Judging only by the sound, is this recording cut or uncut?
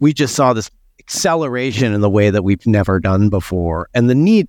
uncut